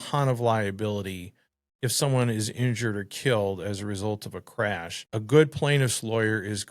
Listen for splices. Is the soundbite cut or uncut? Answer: cut